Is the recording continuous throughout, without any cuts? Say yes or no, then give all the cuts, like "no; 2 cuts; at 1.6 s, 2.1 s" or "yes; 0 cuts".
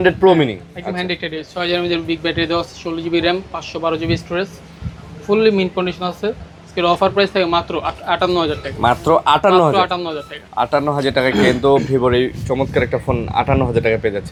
yes; 0 cuts